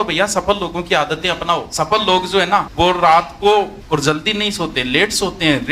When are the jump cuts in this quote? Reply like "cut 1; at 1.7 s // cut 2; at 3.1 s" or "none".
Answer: cut 1; at 1.7 s // cut 2; at 2.7 s // cut 3; at 3.8 s